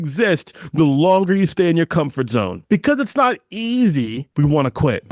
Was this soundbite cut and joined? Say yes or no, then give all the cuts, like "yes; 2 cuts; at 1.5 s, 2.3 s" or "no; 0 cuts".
yes; 2 cuts; at 2.6 s, 4.2 s